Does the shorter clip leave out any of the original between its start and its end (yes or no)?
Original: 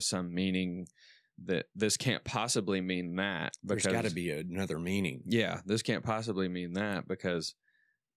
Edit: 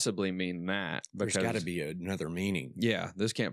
no